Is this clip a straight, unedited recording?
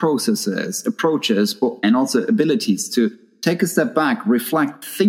yes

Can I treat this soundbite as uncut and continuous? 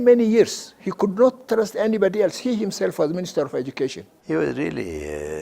no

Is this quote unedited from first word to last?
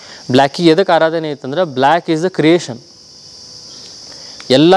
yes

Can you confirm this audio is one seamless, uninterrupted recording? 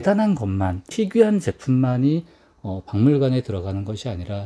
no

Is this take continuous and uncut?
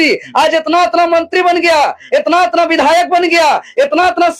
yes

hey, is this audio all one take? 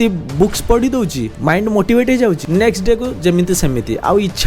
no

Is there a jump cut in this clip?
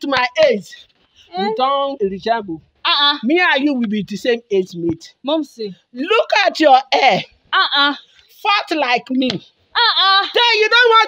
yes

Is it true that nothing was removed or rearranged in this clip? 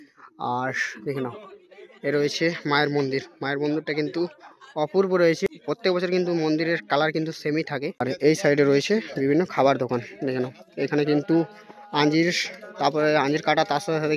no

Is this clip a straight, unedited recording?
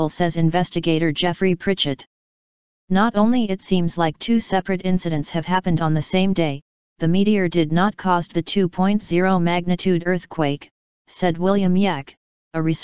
no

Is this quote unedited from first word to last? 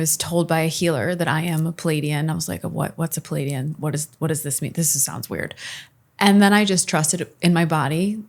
yes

